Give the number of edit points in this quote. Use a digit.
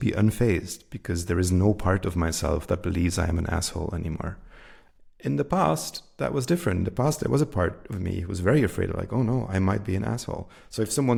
0